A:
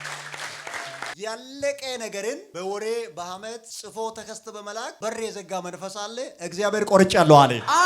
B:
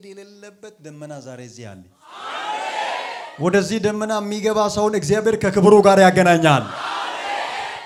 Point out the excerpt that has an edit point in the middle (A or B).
A